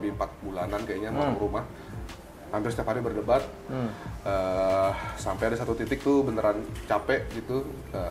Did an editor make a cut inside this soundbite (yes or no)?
no